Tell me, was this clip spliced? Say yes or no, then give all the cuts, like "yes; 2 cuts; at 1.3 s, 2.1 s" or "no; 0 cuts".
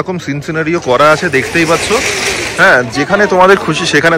no; 0 cuts